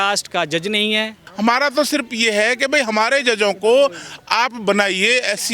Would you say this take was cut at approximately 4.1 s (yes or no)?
no